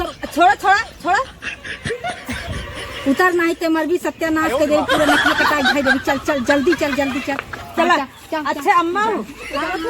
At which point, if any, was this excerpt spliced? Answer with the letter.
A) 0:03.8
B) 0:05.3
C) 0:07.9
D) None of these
C